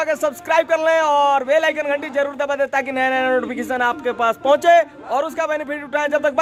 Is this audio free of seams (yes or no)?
yes